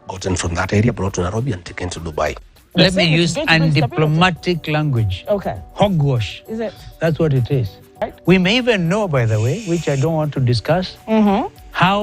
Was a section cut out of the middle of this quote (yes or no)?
yes